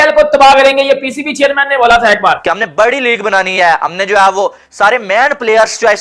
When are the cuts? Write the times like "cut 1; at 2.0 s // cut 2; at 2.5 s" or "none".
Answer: cut 1; at 2.4 s